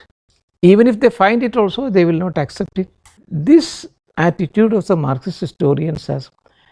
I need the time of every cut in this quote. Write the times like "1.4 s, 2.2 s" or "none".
3.3 s